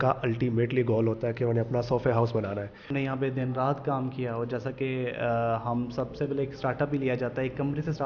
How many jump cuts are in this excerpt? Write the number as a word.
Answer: one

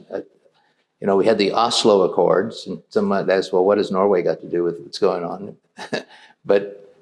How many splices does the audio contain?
zero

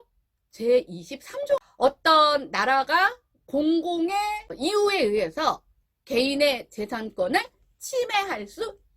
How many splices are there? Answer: two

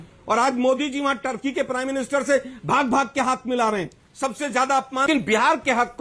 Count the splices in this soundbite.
one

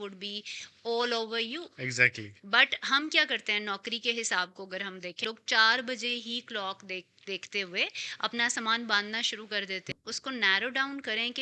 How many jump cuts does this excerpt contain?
two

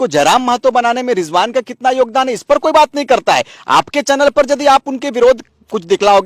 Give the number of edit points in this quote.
zero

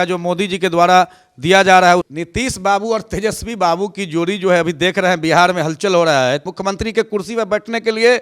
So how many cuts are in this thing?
two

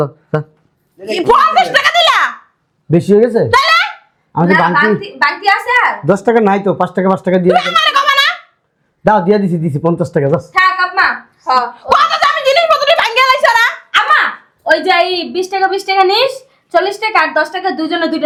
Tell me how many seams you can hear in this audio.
zero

